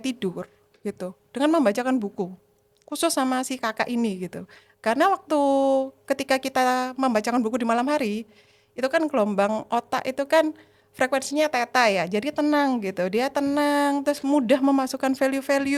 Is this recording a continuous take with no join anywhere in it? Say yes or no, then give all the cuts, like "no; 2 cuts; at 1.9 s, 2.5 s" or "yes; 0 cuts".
yes; 0 cuts